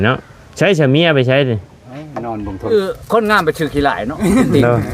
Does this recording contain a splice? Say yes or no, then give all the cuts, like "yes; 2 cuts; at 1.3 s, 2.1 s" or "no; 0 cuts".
yes; 1 cut; at 2.7 s